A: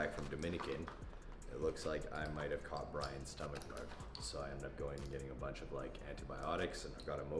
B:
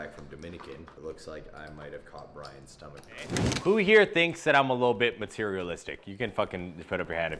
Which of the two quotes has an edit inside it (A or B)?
B